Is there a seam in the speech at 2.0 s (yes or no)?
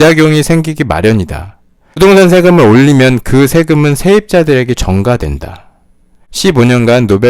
yes